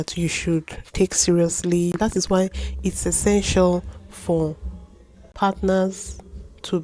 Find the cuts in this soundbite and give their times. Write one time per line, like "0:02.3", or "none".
0:02.0
0:05.3